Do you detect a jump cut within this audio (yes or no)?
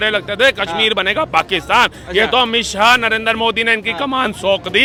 no